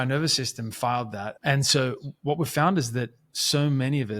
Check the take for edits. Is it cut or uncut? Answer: cut